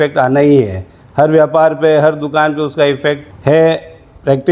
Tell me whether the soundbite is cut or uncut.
cut